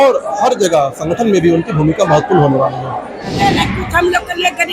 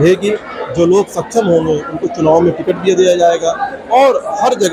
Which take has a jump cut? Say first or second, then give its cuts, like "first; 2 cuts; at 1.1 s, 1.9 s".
first; 1 cut; at 3.4 s